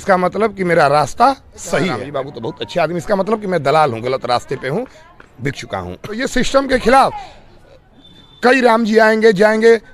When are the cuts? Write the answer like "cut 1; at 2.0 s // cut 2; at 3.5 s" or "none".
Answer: cut 1; at 2.0 s // cut 2; at 6.2 s